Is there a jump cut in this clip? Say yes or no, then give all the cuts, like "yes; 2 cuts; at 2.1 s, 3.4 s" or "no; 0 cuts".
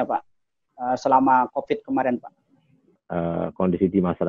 yes; 1 cut; at 2.9 s